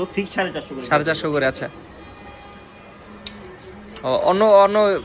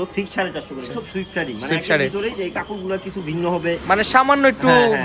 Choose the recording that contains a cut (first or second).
second